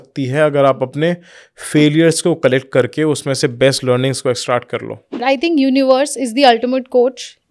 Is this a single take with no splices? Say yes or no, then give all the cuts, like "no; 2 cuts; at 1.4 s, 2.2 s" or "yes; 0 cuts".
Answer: no; 1 cut; at 5.2 s